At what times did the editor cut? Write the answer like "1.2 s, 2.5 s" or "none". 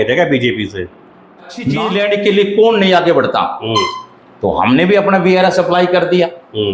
1.7 s